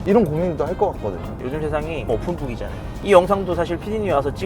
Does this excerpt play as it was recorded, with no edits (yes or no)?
no